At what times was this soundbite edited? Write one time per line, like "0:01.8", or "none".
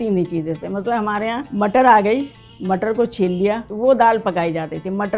0:01.5
0:03.7